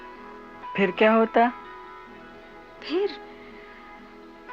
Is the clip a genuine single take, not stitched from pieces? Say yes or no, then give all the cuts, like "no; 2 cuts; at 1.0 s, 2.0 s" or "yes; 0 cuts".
yes; 0 cuts